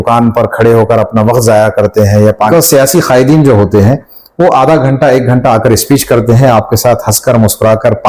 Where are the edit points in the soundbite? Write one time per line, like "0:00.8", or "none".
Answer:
0:02.5